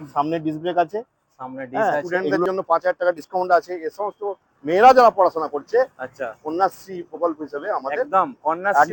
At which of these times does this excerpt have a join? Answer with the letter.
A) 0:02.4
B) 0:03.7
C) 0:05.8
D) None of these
A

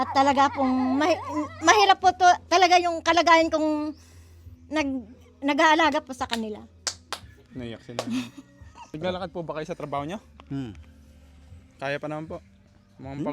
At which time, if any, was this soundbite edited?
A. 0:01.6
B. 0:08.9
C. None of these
B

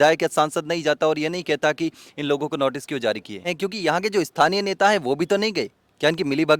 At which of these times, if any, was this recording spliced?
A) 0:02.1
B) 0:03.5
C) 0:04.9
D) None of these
B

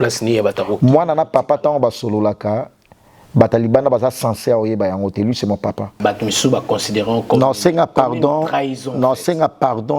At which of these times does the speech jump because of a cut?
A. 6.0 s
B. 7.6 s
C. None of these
A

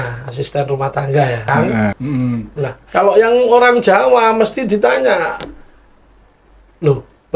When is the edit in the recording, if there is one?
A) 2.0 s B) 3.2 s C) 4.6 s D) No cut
A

